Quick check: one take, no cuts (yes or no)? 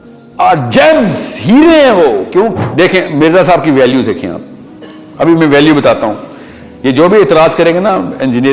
no